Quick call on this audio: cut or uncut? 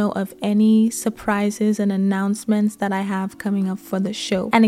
uncut